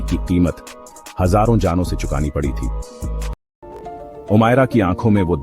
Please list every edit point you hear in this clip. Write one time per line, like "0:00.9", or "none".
0:03.3